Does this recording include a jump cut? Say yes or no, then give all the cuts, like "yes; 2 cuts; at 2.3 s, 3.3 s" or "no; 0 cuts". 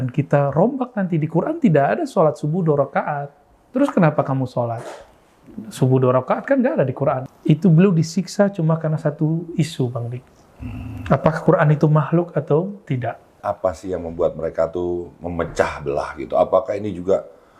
yes; 2 cuts; at 7.3 s, 13.3 s